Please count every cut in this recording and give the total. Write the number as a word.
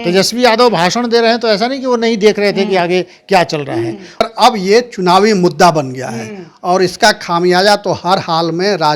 one